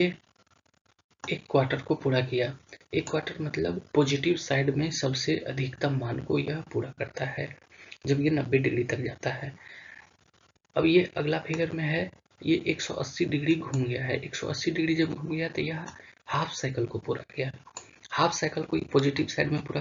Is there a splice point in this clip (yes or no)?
yes